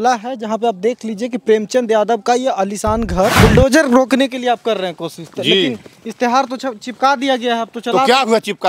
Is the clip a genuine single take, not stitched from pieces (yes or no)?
no